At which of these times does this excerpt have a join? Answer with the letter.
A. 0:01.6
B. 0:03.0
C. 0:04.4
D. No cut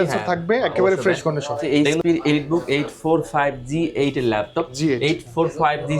A